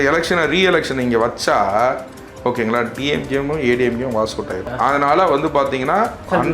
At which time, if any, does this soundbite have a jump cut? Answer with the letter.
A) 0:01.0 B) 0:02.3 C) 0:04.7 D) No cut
C